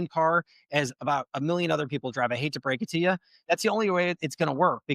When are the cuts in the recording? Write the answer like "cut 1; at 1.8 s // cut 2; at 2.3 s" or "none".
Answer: cut 1; at 3.3 s

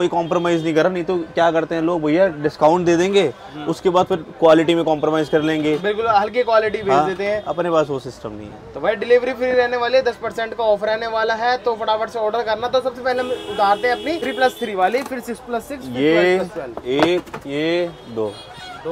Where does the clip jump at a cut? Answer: none

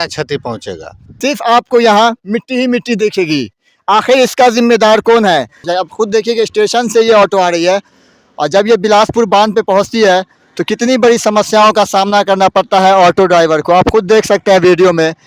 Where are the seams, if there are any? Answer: cut 1; at 1.0 s // cut 2; at 5.7 s

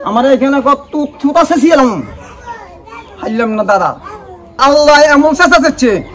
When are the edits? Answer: cut 1; at 4.6 s

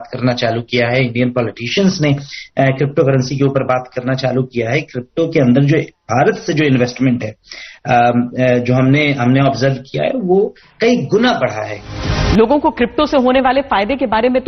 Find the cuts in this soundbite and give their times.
cut 1; at 12.3 s

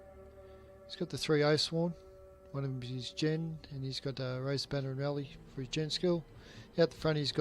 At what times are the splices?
cut 1; at 3.0 s

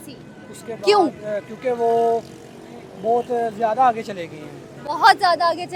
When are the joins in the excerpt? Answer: none

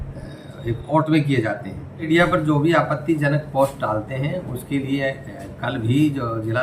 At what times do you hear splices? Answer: cut 1; at 2.1 s

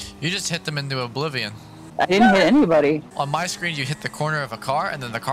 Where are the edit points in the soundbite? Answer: cut 1; at 1.9 s // cut 2; at 3.1 s

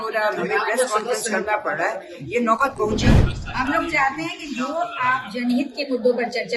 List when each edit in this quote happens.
cut 1; at 3.1 s

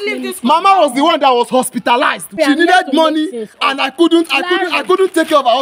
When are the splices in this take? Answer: cut 1; at 2.4 s

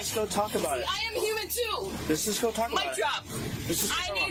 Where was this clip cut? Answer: none

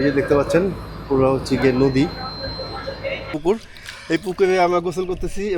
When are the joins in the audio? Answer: cut 1; at 3.3 s

